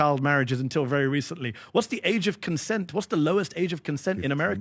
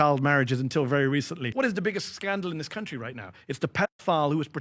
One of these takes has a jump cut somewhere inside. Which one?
second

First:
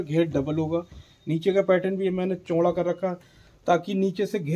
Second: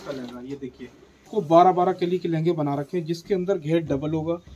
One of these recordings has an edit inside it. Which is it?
second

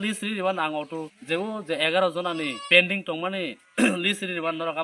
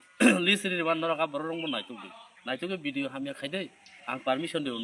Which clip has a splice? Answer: first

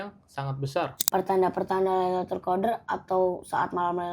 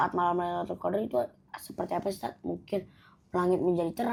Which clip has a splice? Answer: first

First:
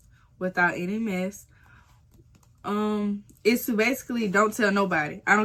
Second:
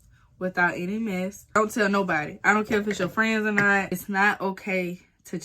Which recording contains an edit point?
second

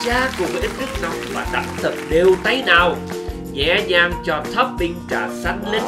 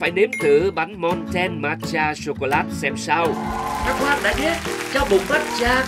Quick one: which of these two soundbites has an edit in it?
second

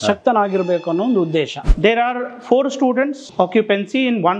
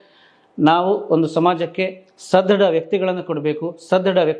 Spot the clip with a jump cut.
first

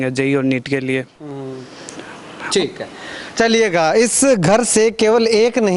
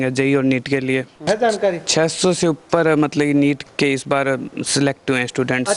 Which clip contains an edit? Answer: second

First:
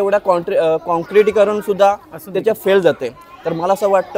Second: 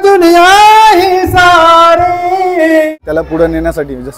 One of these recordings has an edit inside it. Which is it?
second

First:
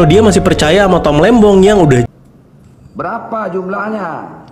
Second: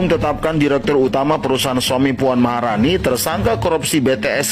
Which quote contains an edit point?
first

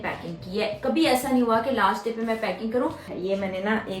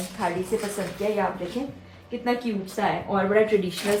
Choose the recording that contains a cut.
first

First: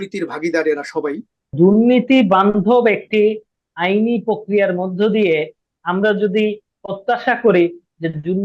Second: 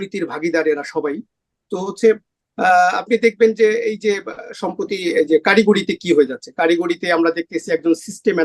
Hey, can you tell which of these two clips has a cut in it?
first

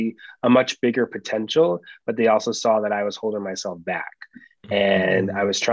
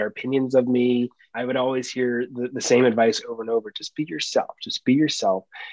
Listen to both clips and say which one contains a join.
second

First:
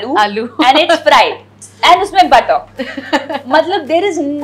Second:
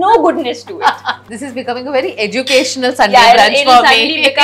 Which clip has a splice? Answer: second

